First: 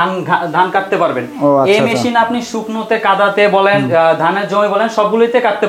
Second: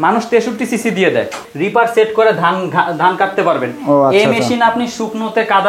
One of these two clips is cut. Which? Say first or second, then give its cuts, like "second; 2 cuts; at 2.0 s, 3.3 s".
second; 1 cut; at 1.5 s